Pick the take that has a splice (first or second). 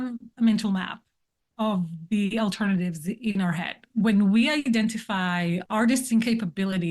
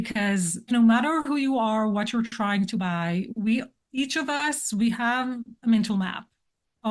first